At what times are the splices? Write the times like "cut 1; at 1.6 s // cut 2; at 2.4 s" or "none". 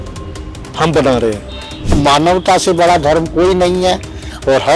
cut 1; at 2.0 s